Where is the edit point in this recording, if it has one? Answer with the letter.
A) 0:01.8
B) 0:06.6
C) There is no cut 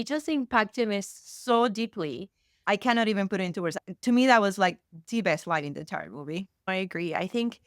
B